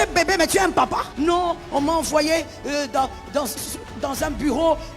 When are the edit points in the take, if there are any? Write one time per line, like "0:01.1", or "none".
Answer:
0:01.1